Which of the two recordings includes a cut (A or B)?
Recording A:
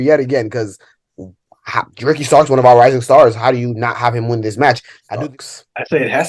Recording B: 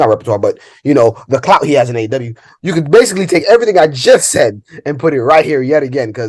A